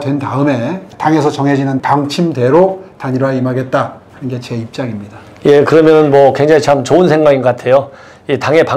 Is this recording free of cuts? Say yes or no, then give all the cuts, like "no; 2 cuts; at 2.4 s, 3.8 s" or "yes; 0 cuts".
yes; 0 cuts